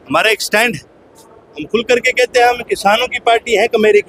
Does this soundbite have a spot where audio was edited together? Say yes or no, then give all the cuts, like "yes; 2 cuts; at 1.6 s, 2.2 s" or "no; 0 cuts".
no; 0 cuts